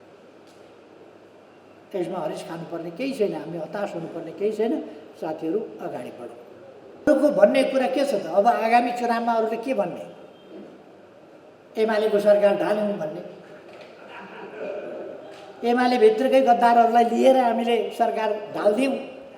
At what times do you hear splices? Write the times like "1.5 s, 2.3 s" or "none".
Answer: 7.1 s